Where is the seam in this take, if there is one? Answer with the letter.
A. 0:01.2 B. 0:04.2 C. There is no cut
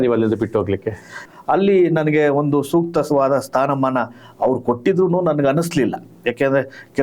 A